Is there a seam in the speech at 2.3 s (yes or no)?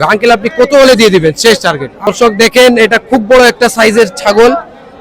yes